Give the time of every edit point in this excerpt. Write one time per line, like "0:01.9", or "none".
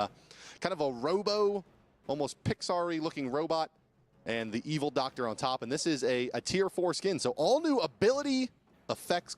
0:06.2